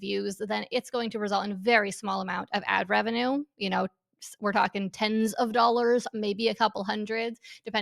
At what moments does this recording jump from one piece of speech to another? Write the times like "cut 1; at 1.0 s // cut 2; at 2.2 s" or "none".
none